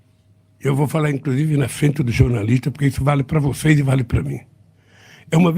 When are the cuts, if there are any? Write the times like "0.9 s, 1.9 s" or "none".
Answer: 3.3 s